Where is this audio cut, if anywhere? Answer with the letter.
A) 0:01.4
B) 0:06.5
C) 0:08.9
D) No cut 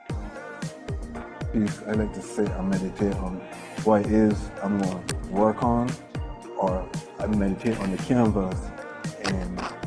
C